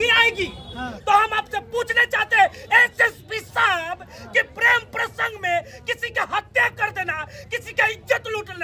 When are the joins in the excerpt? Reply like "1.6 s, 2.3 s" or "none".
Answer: 0.9 s